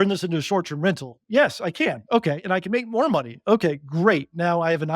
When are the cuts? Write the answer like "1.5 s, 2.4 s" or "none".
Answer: 1.1 s